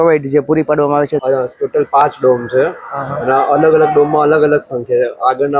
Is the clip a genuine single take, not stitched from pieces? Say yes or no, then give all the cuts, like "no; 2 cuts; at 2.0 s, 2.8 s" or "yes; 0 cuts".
no; 1 cut; at 1.2 s